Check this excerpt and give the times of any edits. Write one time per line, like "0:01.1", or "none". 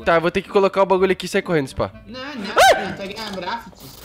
none